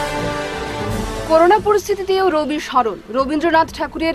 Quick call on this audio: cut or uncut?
cut